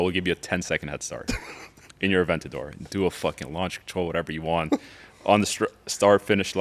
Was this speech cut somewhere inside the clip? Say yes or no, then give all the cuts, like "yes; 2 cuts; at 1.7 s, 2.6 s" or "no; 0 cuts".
no; 0 cuts